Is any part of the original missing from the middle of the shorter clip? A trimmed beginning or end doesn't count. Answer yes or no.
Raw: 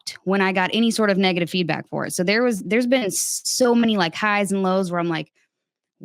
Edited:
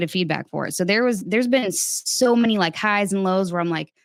no